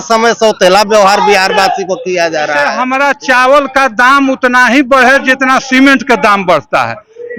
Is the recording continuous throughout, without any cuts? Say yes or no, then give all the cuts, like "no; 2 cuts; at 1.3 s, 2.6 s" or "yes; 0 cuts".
no; 1 cut; at 2.8 s